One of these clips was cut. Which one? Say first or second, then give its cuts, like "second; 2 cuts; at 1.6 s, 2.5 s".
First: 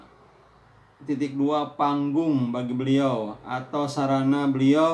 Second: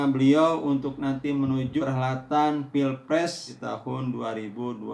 second; 2 cuts; at 1.8 s, 3.5 s